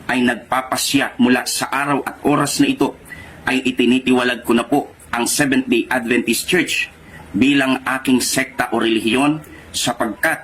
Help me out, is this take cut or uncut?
cut